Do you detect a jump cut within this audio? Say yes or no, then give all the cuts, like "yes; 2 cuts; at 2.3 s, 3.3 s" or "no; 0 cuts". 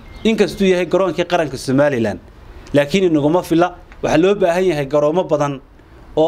no; 0 cuts